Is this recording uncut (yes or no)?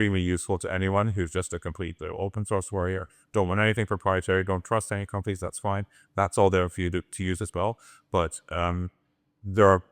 yes